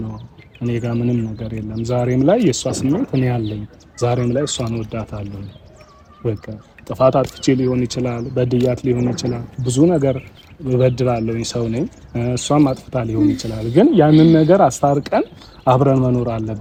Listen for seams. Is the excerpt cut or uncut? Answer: uncut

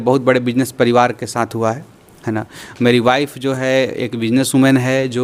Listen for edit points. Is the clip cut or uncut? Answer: uncut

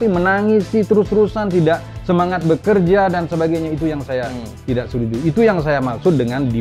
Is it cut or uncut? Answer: uncut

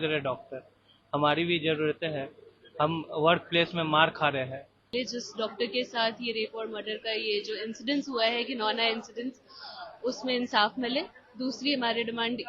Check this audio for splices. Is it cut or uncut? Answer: cut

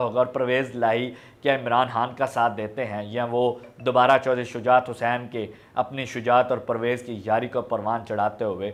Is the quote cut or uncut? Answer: uncut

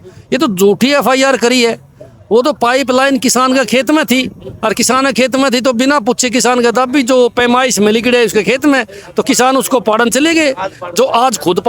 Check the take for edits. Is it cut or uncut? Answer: uncut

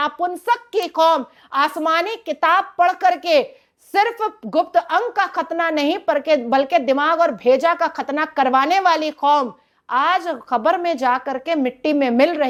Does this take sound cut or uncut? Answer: uncut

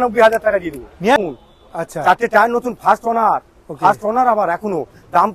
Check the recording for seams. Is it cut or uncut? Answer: cut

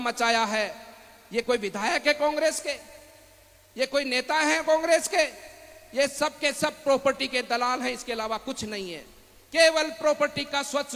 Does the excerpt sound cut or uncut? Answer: uncut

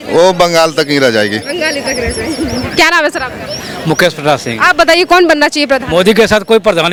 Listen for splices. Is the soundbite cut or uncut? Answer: uncut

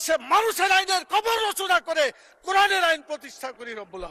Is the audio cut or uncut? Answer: uncut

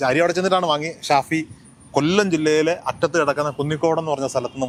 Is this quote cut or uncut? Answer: uncut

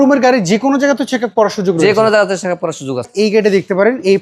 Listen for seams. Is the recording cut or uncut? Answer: cut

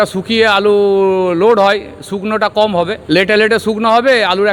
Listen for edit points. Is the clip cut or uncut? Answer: cut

